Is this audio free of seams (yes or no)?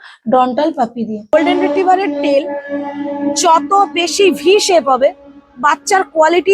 no